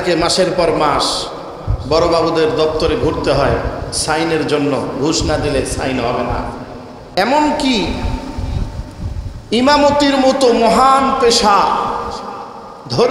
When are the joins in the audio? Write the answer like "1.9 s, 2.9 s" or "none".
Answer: 7.2 s